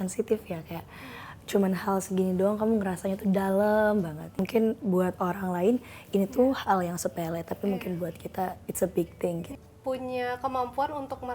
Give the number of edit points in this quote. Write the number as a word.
two